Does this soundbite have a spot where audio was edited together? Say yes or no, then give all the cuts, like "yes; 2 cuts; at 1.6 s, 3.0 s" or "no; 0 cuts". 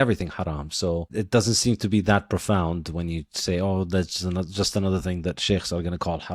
yes; 1 cut; at 1.1 s